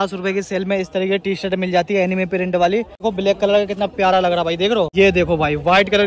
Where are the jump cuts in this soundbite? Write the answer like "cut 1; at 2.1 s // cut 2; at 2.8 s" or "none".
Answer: cut 1; at 3.0 s // cut 2; at 4.9 s